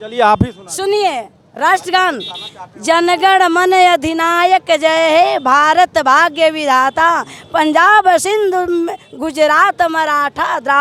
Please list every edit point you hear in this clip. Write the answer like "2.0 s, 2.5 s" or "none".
none